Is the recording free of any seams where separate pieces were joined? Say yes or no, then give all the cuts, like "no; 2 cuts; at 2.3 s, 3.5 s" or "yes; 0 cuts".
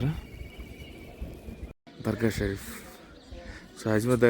no; 1 cut; at 1.9 s